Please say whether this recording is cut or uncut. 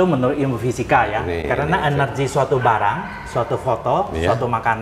uncut